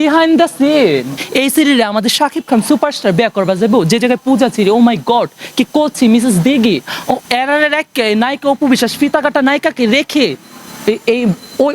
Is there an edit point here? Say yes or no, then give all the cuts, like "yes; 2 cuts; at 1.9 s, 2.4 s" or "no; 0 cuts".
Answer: yes; 1 cut; at 1.1 s